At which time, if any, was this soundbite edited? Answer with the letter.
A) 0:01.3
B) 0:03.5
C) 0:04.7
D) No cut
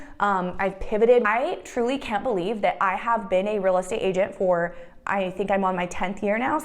A